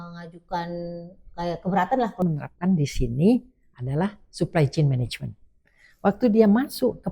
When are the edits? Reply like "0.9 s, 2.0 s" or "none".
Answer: 2.2 s